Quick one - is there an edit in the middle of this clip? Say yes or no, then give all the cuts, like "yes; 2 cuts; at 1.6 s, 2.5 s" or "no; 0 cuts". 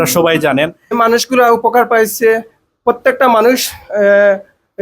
yes; 1 cut; at 0.9 s